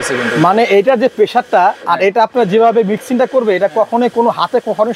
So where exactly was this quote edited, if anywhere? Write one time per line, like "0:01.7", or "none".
none